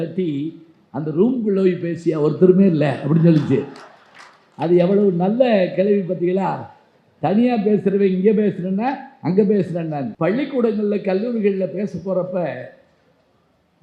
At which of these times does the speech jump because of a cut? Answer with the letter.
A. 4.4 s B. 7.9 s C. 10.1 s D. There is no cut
C